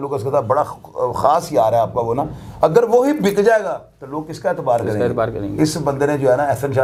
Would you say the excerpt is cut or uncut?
uncut